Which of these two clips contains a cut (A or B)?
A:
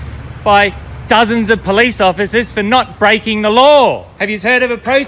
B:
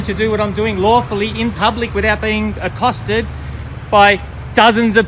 A